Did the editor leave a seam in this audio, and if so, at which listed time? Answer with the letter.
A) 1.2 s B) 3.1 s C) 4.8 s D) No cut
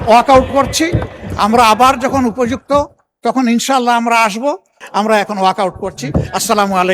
C